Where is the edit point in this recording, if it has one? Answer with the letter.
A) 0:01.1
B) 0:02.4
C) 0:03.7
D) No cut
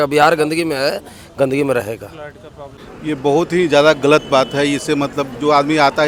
D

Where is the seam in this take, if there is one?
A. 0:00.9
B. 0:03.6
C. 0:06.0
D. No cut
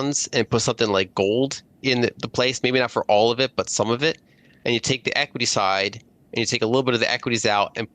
D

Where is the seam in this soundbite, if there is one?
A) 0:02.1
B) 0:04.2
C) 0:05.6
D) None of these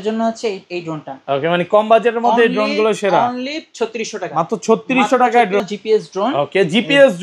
C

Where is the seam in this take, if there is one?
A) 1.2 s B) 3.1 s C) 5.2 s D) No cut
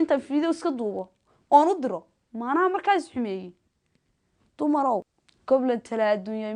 C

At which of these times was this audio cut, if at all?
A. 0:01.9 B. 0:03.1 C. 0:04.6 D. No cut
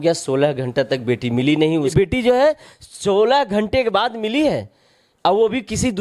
A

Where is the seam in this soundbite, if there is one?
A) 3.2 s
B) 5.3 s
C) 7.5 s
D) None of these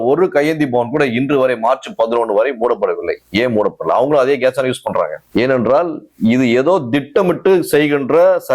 B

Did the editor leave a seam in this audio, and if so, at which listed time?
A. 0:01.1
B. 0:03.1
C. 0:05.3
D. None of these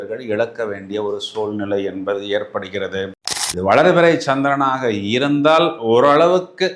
B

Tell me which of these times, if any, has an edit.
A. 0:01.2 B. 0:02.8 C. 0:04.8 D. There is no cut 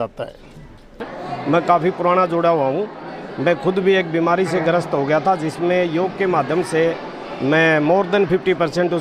A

